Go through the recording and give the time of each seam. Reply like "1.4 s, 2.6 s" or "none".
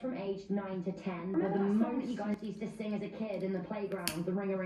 2.0 s